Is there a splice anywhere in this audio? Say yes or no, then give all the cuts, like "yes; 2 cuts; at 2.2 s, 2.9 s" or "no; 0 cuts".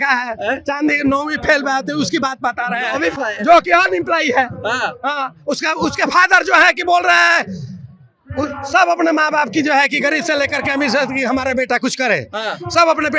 no; 0 cuts